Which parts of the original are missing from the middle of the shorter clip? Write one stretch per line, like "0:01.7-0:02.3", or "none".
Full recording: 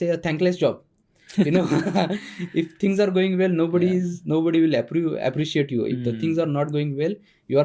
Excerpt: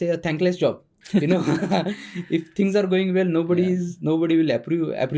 0:00.9-0:01.1